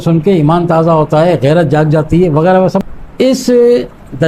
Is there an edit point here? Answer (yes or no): yes